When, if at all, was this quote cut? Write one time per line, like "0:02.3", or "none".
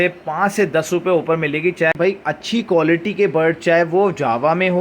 0:01.9